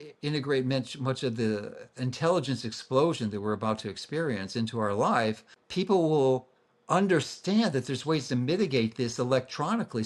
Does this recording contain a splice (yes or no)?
yes